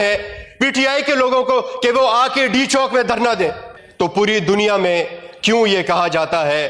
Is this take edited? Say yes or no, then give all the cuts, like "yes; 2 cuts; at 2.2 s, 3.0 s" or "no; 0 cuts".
yes; 1 cut; at 3.7 s